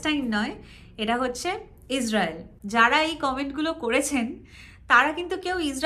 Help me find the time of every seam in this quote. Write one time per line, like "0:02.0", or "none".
0:02.5